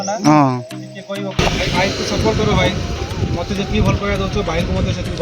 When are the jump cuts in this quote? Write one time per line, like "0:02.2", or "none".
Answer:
0:01.4